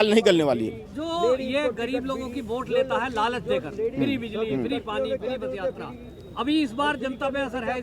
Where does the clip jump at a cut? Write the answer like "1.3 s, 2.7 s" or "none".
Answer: none